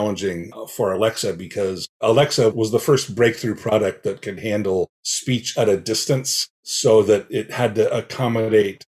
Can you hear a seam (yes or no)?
no